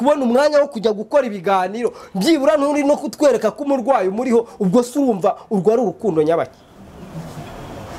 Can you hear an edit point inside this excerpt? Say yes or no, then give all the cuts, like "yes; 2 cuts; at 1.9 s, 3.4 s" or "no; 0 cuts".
no; 0 cuts